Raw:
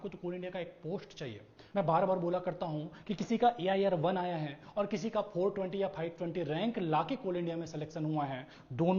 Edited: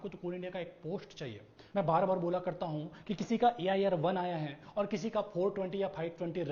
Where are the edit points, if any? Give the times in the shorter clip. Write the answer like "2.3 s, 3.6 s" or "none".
none